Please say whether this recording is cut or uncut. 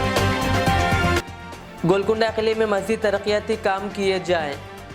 cut